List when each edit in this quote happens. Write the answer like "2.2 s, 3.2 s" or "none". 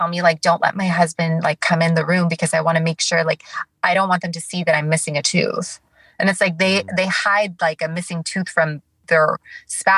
none